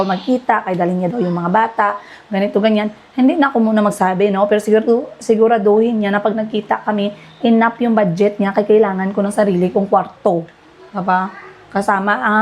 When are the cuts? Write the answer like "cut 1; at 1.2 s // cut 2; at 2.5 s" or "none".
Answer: none

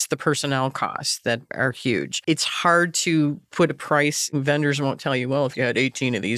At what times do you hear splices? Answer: cut 1; at 1.7 s // cut 2; at 4.3 s

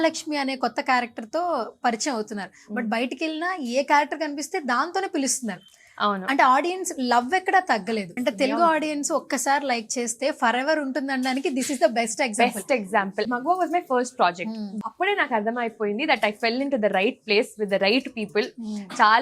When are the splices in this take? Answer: cut 1; at 8.2 s // cut 2; at 13.2 s // cut 3; at 14.8 s

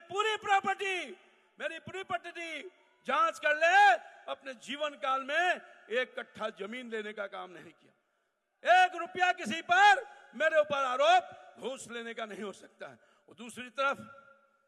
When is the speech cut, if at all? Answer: none

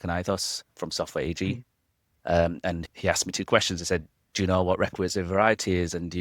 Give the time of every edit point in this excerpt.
cut 1; at 2.8 s // cut 2; at 4.2 s

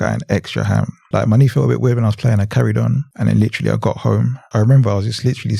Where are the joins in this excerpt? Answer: cut 1; at 1.0 s // cut 2; at 3.1 s // cut 3; at 4.4 s

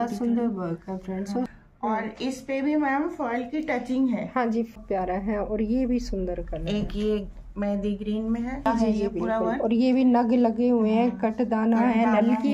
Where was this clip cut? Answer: cut 1; at 1.5 s // cut 2; at 4.8 s // cut 3; at 8.7 s

